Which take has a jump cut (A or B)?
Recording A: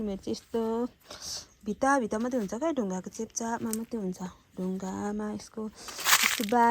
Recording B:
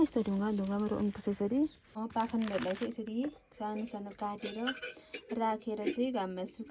B